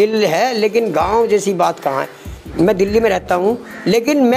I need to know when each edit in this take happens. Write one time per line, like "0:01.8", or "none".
0:02.4

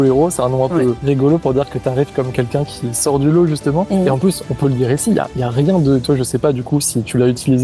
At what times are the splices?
0:01.0
0:03.9

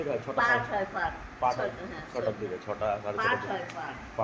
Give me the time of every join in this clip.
none

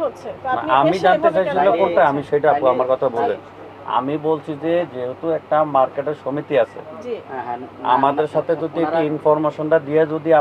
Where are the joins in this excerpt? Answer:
none

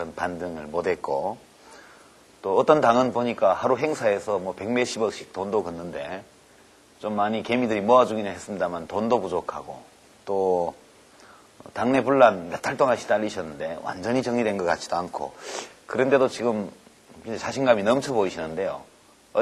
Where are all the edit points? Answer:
none

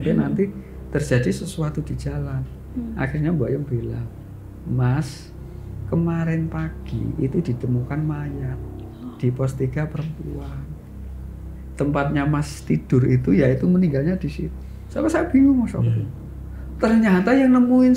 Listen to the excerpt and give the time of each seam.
0:14.6

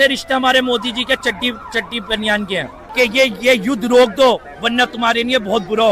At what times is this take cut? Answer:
0:02.8

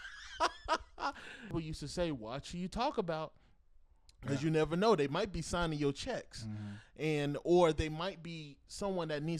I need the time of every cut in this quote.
0:01.4

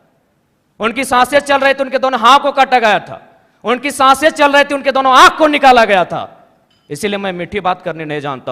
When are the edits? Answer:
none

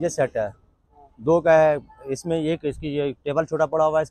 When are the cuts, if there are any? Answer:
none

